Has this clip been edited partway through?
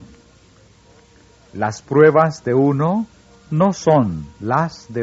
no; 0 cuts

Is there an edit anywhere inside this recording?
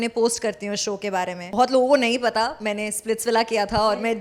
yes; 1 cut; at 1.5 s

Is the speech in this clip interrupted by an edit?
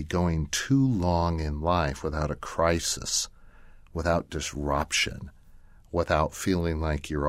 no; 0 cuts

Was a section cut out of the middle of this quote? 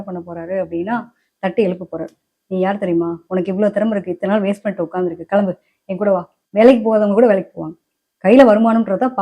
yes; 1 cut; at 6.4 s

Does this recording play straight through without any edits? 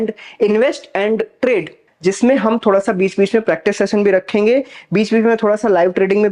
no; 1 cut; at 1.8 s

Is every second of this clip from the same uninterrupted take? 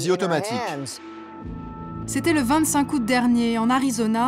yes; 0 cuts

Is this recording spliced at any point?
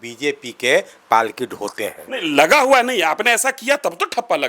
no; 0 cuts

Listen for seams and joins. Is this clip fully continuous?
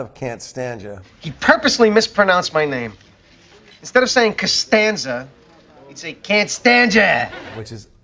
yes; 0 cuts

